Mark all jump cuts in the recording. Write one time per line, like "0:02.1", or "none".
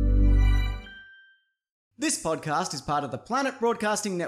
0:02.0